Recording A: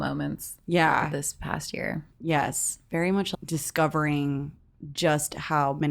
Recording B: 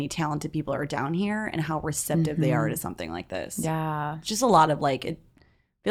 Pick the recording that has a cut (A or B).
A